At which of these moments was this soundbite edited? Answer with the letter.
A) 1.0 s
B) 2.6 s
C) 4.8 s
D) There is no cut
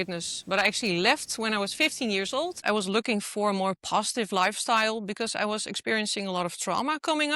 B